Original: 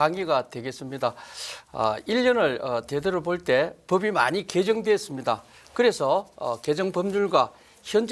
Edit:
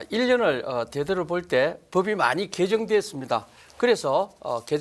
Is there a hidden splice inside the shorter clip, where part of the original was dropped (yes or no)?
no